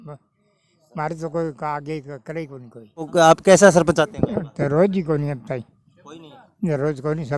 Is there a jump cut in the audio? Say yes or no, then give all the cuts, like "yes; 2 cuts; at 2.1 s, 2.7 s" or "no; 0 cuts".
no; 0 cuts